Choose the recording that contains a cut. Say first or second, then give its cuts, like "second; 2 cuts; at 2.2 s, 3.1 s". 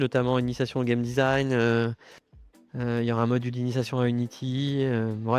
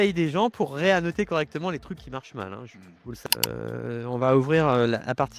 second; 1 cut; at 3.1 s